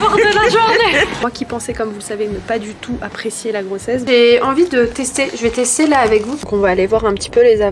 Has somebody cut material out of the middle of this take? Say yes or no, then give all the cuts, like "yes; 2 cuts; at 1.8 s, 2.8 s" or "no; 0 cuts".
yes; 3 cuts; at 1.2 s, 4.0 s, 6.4 s